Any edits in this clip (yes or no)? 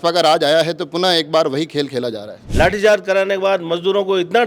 yes